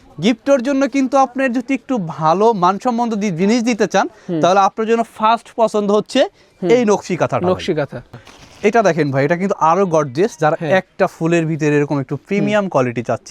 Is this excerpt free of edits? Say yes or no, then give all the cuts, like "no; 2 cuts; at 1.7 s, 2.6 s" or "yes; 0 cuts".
no; 1 cut; at 8.2 s